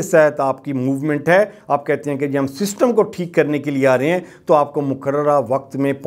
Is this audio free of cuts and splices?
yes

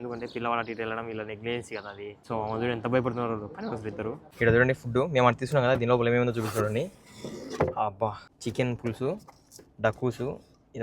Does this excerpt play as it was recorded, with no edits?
no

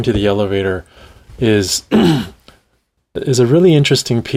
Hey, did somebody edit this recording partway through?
no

